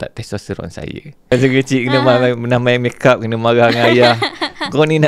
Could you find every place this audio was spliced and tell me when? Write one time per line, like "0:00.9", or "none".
0:01.3